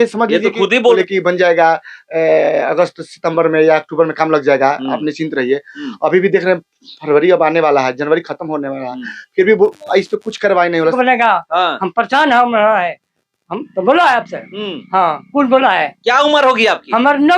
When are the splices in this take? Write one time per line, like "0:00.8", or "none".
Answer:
0:01.0
0:10.9

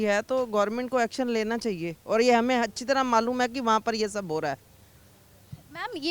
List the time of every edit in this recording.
none

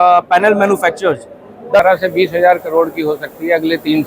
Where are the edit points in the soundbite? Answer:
0:01.8

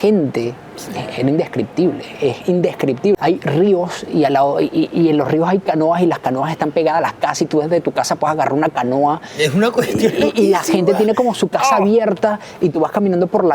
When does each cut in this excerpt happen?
0:03.2

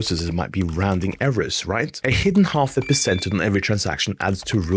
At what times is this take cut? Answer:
0:02.0

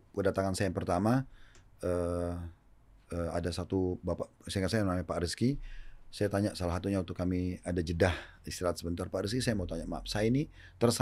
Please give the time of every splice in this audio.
none

